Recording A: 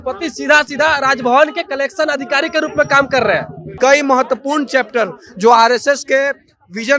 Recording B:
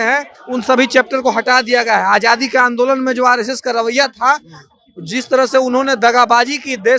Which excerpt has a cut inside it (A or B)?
A